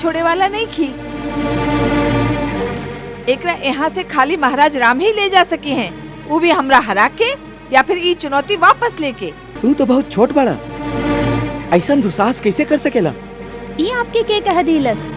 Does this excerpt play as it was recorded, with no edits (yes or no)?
no